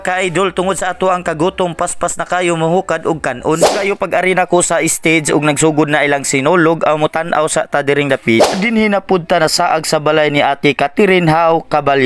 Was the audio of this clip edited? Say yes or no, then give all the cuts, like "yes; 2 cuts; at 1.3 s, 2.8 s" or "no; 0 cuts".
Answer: yes; 2 cuts; at 3.7 s, 8.5 s